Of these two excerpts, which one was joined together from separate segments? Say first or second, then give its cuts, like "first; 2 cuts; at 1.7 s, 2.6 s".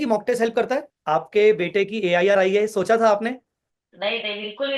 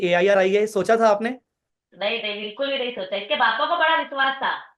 first; 1 cut; at 0.9 s